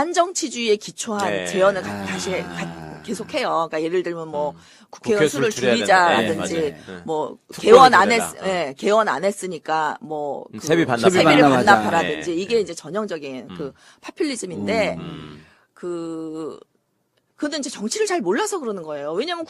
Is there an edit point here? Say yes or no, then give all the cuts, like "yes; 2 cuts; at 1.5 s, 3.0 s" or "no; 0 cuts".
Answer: yes; 1 cut; at 18.1 s